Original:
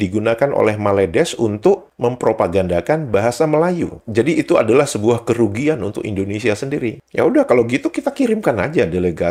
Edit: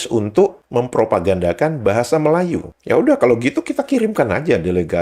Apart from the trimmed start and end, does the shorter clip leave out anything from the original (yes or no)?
yes